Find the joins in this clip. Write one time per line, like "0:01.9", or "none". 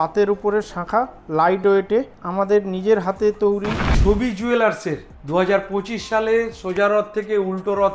0:03.9